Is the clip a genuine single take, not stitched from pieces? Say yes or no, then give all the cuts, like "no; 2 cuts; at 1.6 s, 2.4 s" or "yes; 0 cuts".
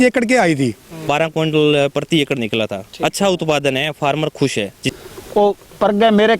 no; 2 cuts; at 1.0 s, 4.8 s